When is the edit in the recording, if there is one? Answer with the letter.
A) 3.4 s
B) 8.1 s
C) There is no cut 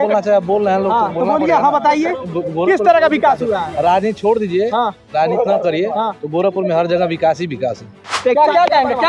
B